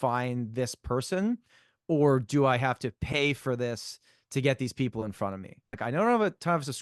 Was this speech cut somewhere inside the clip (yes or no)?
yes